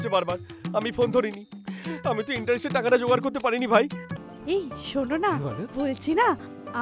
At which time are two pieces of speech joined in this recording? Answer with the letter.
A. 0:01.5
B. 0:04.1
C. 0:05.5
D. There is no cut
B